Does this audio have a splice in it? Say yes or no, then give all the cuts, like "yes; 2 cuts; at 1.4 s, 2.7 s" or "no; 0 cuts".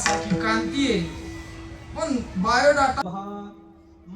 yes; 1 cut; at 3.0 s